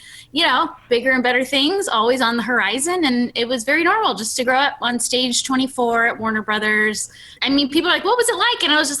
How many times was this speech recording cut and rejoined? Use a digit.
1